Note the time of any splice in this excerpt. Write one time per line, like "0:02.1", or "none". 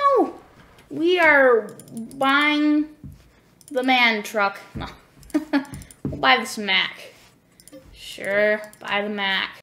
none